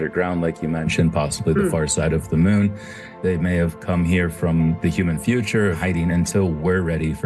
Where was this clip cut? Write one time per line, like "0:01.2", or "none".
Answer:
0:03.1
0:05.8